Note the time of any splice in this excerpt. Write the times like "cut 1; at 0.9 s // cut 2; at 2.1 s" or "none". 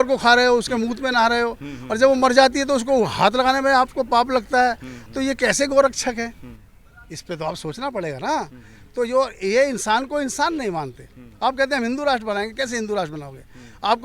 none